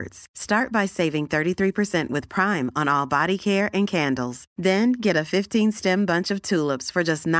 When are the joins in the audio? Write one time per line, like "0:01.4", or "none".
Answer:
none